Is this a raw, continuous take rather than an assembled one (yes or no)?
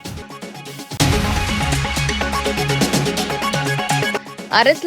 no